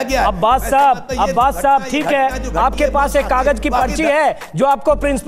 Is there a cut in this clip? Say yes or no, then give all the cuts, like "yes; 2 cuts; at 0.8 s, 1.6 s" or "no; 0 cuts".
no; 0 cuts